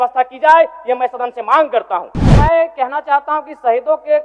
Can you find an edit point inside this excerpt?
yes; 1 cut; at 2.2 s

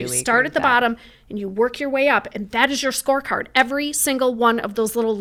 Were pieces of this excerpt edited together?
no; 0 cuts

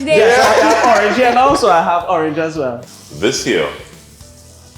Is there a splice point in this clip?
yes; 1 cut; at 2.8 s

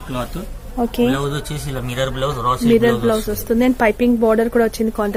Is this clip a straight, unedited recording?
yes; 0 cuts

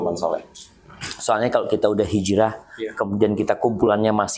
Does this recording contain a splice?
no; 0 cuts

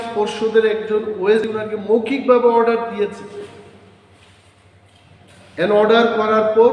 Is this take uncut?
no; 1 cut; at 1.4 s

